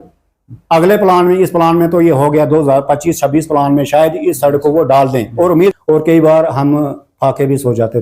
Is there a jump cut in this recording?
yes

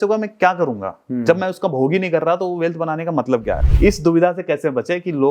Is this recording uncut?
no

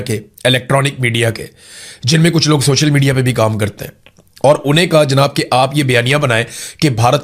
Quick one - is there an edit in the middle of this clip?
no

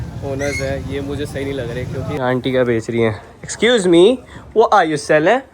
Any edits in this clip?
yes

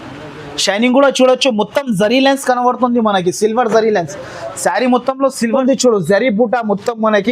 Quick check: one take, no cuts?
no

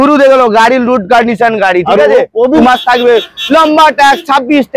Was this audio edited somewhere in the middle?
yes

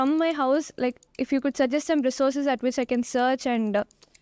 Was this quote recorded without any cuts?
yes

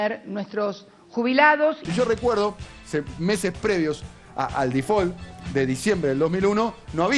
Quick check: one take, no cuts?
no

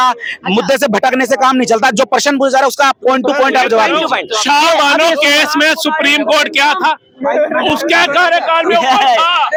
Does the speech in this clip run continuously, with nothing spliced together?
yes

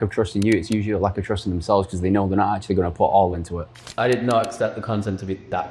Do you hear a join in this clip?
yes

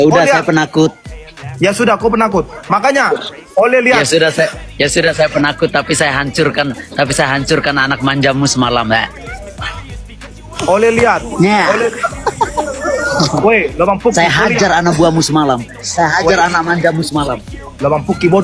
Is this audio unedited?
yes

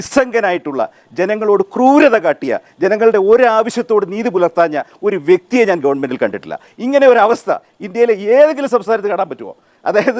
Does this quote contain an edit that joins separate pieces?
yes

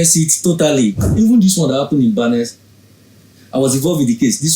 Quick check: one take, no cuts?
no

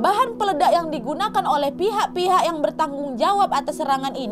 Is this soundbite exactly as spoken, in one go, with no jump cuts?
yes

